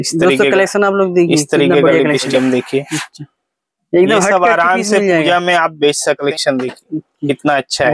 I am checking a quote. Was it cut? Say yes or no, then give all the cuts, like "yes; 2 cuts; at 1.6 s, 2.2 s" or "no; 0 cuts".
yes; 2 cuts; at 2.3 s, 6.2 s